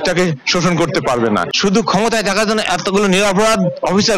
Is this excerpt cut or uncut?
cut